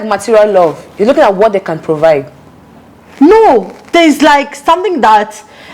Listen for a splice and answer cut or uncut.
uncut